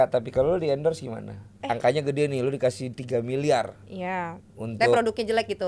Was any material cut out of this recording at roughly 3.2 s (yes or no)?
no